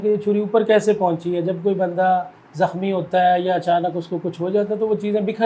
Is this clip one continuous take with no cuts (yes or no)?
yes